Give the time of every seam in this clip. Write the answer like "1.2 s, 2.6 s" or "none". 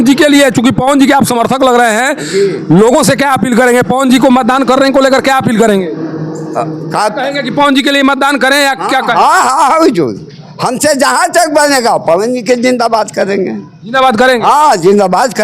none